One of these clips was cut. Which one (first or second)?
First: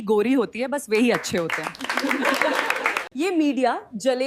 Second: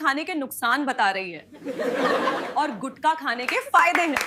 first